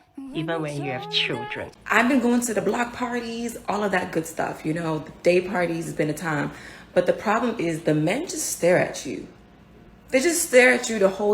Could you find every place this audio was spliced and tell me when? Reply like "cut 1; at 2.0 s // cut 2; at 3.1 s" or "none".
cut 1; at 1.7 s